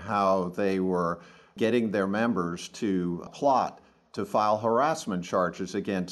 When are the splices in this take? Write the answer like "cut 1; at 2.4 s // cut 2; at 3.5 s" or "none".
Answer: cut 1; at 1.5 s // cut 2; at 3.3 s